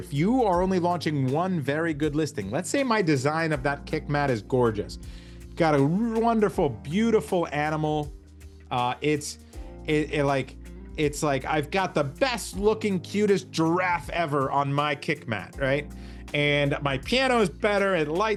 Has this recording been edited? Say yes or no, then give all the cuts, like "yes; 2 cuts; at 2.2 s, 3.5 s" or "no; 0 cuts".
no; 0 cuts